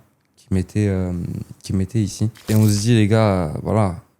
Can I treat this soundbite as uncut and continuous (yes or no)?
no